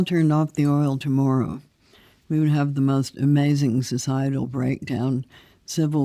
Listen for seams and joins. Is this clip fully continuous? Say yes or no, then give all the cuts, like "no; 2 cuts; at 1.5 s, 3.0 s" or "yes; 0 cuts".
yes; 0 cuts